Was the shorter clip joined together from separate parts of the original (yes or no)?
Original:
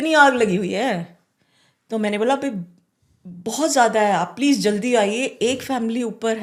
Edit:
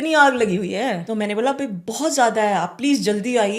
yes